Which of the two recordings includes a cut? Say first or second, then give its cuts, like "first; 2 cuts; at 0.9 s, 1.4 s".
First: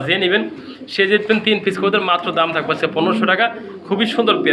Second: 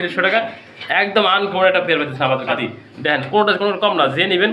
second; 1 cut; at 2.6 s